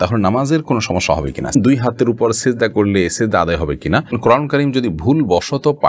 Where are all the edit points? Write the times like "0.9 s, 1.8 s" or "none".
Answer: 1.5 s, 4.2 s